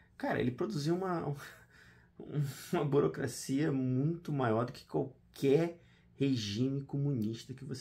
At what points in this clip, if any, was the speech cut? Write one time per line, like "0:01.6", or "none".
none